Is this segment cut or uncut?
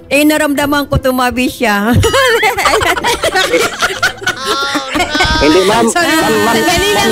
uncut